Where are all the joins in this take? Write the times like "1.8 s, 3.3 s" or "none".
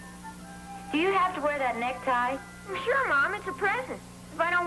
1.7 s